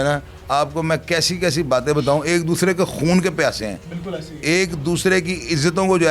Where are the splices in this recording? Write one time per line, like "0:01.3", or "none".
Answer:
none